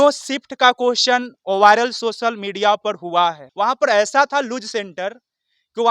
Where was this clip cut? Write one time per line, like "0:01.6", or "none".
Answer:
0:03.4